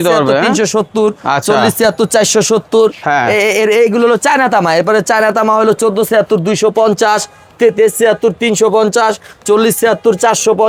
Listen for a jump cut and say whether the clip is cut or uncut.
uncut